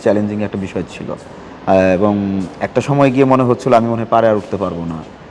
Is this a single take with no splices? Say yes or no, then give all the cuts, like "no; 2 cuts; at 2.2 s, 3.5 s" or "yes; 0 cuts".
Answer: yes; 0 cuts